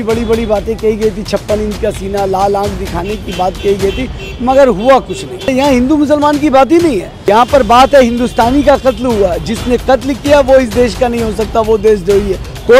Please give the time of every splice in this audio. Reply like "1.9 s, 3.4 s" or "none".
5.5 s, 7.1 s